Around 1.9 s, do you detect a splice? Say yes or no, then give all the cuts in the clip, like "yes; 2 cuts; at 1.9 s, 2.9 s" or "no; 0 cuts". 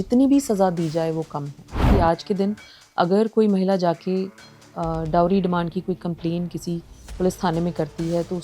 yes; 1 cut; at 1.9 s